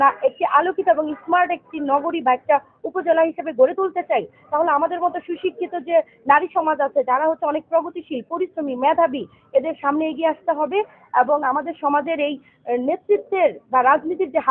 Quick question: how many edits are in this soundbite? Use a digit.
0